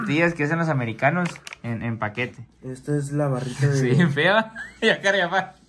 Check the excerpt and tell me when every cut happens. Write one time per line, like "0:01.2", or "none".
0:02.5